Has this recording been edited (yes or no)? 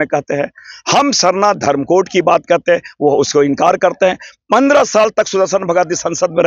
no